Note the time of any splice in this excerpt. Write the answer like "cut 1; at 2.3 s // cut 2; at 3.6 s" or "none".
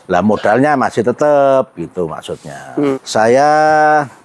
cut 1; at 3.0 s